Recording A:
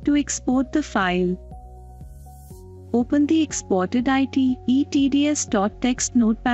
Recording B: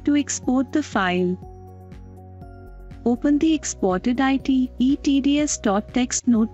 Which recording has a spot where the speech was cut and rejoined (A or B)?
B